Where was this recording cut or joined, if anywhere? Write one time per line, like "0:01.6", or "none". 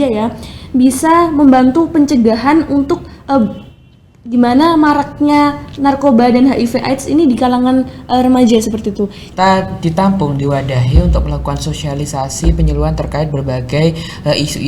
0:09.2